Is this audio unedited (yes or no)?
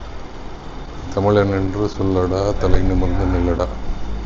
yes